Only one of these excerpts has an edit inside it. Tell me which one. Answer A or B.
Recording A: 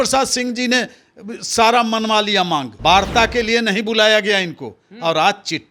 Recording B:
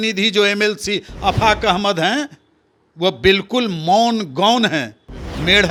A